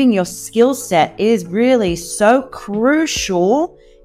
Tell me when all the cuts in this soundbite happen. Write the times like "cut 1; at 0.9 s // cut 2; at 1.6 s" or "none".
none